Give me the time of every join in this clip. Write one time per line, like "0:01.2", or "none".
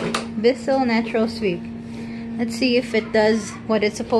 none